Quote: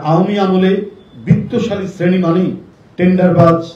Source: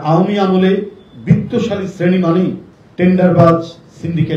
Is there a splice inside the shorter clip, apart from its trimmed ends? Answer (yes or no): no